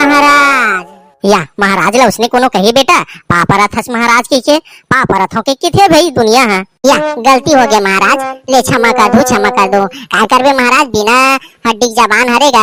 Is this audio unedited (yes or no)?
yes